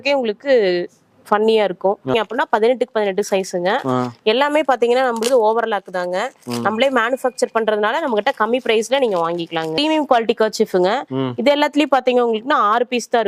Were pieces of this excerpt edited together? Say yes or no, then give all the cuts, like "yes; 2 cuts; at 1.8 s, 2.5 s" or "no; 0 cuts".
yes; 2 cuts; at 2.1 s, 9.8 s